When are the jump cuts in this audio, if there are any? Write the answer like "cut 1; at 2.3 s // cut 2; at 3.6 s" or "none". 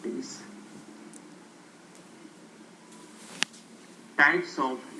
none